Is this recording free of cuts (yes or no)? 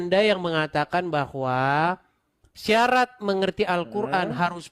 yes